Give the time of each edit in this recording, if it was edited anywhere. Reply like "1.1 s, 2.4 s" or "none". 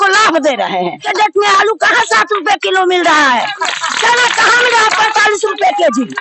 1.0 s